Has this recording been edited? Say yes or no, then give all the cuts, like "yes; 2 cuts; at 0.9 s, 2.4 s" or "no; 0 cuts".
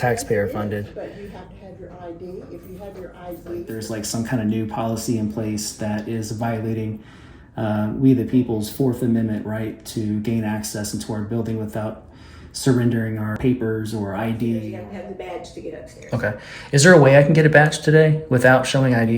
yes; 3 cuts; at 3.7 s, 13.4 s, 14.8 s